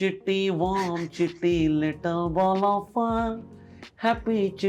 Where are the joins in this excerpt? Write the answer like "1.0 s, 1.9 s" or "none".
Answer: none